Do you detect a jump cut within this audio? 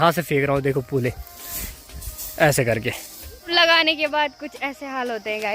yes; 1 cut; at 3.5 s

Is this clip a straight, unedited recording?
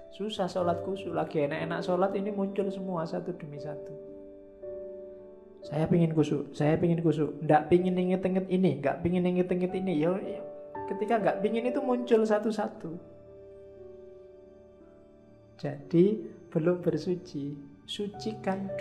no; 2 cuts; at 3.8 s, 5.8 s

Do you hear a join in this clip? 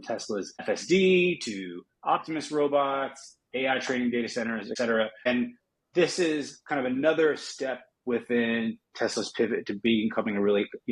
no; 0 cuts

